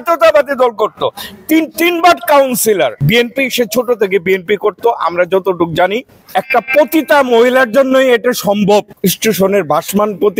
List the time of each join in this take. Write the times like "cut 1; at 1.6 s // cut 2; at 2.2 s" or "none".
cut 1; at 3.0 s // cut 2; at 6.1 s // cut 3; at 8.9 s